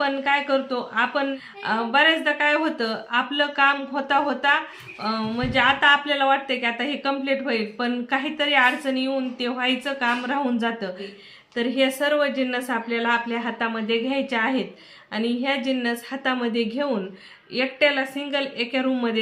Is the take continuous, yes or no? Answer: no